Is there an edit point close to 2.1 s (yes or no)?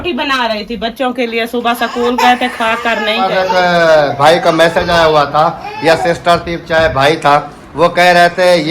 no